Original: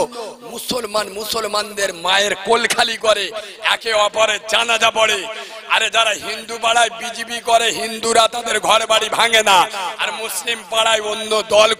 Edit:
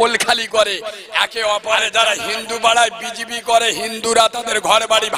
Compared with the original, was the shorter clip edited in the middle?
yes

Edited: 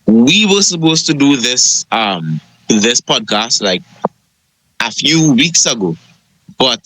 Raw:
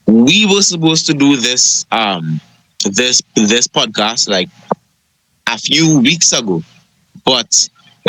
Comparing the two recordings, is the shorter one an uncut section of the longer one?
no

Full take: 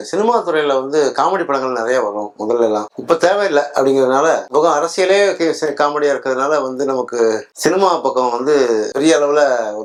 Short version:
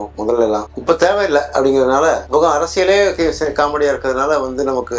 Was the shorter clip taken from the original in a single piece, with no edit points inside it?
yes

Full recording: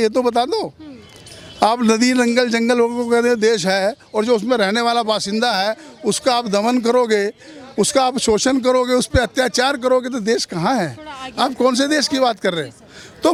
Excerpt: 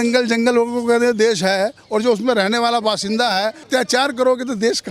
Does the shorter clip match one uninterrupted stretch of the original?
no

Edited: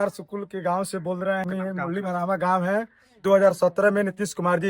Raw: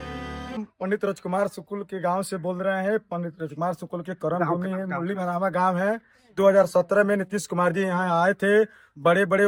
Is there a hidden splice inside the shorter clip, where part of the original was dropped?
yes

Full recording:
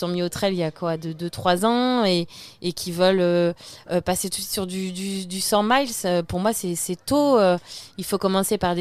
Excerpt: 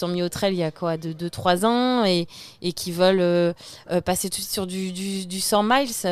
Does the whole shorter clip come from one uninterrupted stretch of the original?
yes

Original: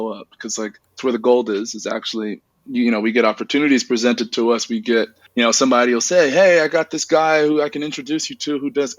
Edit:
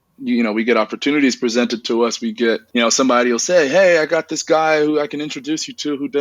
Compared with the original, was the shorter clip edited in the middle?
yes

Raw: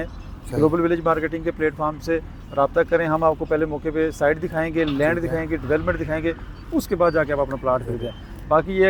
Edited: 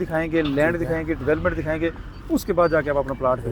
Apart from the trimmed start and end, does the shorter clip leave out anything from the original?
no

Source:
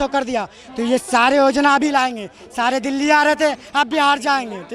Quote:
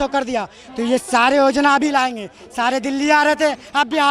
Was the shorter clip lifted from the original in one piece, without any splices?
yes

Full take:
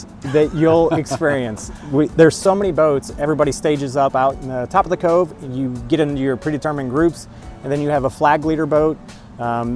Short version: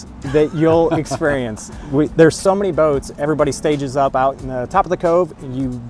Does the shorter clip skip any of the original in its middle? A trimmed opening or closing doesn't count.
no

